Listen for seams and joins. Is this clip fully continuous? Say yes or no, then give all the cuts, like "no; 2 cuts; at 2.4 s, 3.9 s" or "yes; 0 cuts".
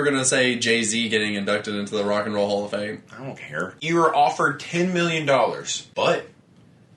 no; 2 cuts; at 3.8 s, 5.7 s